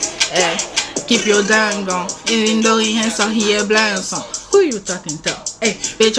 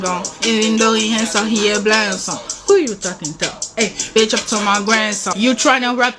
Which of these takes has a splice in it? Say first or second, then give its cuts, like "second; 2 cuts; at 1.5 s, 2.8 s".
second; 1 cut; at 5.3 s